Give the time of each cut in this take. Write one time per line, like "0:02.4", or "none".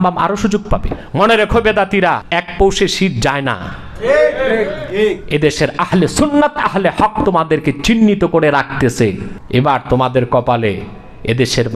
0:01.0
0:02.2
0:09.3